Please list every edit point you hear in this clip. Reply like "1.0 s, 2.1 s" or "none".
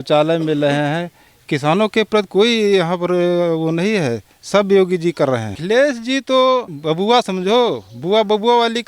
5.6 s, 6.7 s